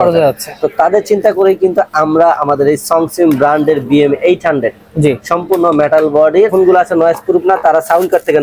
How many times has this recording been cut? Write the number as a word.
one